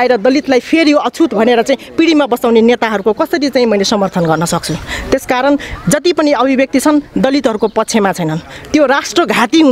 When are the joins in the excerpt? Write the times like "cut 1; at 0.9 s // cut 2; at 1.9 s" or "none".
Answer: none

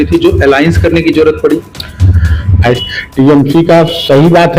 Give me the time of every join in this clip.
cut 1; at 2.8 s

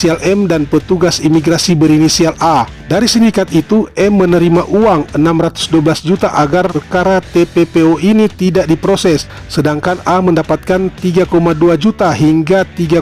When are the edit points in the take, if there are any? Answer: cut 1; at 2.8 s // cut 2; at 9.4 s

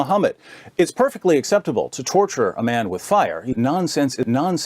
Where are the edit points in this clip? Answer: cut 1; at 3.5 s

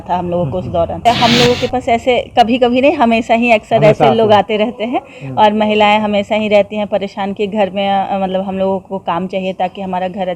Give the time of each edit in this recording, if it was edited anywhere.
cut 1; at 1.0 s

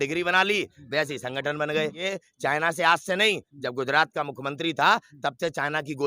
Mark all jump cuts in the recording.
cut 1; at 2.0 s

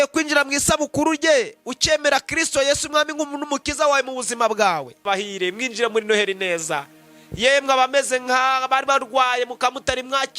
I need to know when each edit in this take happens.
cut 1; at 5.1 s

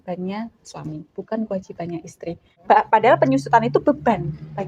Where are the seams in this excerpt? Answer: cut 1; at 2.5 s

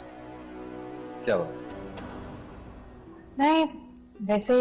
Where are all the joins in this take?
none

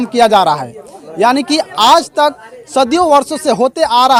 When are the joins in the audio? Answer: none

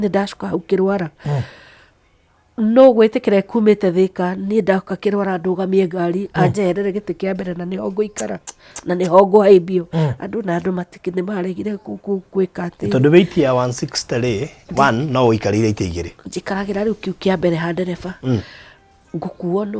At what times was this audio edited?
none

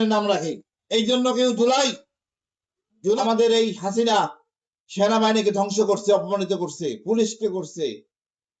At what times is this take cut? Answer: cut 1; at 3.2 s

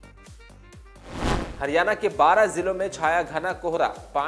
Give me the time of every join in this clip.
cut 1; at 1.5 s

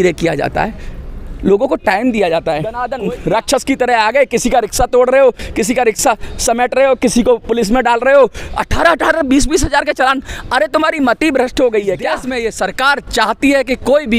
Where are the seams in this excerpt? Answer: cut 1; at 2.9 s // cut 2; at 12.3 s

